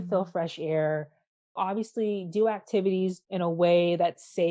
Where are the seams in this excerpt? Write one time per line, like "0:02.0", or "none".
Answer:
0:01.5
0:03.2